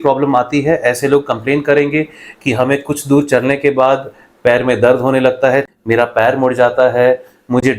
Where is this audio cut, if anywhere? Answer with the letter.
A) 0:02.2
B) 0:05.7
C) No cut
B